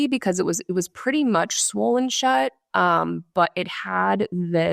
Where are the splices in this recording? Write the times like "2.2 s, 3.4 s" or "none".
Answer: none